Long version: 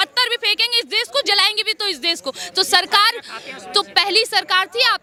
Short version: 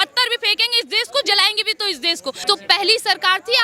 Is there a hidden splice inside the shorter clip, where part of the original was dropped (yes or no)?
yes